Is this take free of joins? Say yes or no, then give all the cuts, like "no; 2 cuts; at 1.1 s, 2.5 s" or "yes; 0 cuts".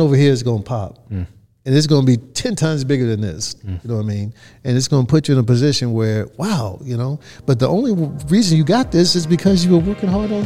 yes; 0 cuts